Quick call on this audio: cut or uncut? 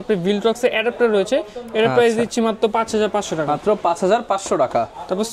uncut